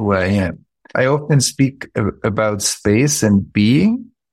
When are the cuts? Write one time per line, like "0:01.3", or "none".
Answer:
0:00.9